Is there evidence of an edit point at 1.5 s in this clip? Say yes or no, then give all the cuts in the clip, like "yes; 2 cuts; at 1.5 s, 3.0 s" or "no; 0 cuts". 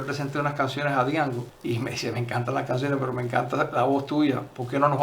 yes; 1 cut; at 1.5 s